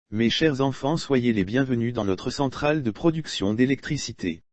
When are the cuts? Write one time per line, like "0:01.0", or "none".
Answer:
0:03.1